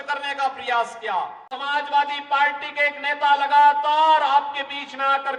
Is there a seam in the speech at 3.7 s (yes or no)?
no